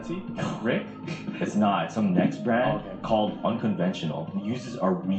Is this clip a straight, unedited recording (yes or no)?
yes